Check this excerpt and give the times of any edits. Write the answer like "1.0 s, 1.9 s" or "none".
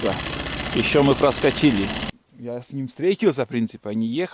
2.0 s